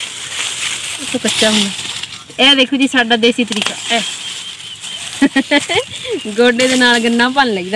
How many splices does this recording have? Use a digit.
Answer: 1